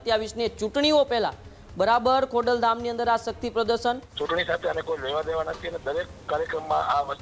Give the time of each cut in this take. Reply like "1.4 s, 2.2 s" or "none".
4.1 s